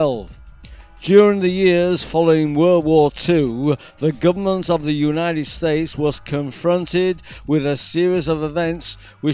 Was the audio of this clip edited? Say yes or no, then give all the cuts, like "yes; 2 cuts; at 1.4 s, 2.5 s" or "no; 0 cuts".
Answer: no; 0 cuts